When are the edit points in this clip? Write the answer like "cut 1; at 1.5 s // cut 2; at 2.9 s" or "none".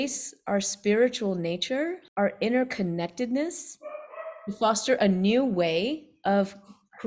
cut 1; at 2.0 s